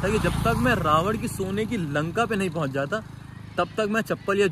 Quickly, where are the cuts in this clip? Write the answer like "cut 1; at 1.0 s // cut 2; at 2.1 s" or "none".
none